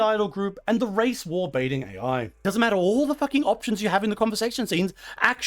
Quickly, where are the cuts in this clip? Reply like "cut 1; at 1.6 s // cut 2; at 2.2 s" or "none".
cut 1; at 2.3 s